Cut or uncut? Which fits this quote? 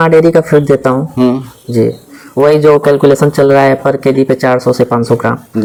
uncut